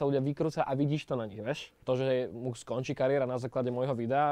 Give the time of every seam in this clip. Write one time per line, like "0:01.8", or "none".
0:01.7